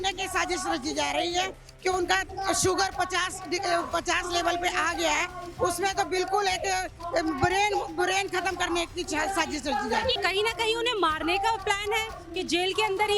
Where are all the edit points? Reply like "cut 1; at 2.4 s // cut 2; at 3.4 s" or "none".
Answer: cut 1; at 10.2 s